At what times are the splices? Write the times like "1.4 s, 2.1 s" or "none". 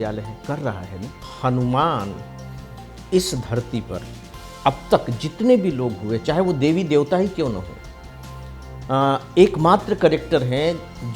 1.3 s

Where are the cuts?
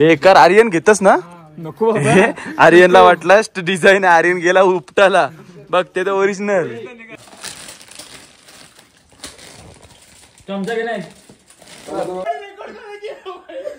7.1 s, 12.2 s

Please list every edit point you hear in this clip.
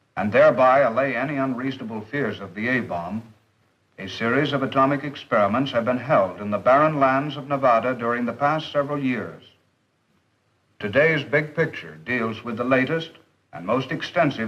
7.4 s

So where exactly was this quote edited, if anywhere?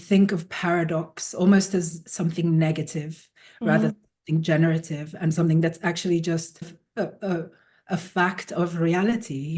6.6 s

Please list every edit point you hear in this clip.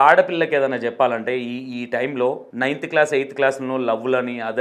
2.5 s

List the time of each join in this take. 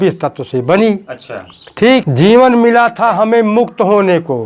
2.1 s

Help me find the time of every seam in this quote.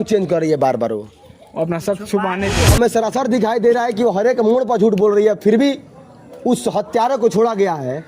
2.6 s

